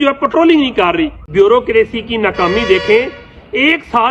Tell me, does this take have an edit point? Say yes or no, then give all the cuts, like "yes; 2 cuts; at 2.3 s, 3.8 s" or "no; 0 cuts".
yes; 1 cut; at 1.2 s